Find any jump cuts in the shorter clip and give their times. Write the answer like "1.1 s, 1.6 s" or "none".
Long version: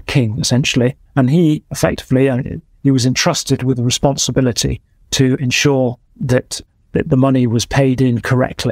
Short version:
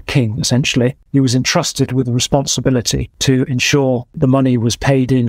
1.0 s, 3.0 s, 4.2 s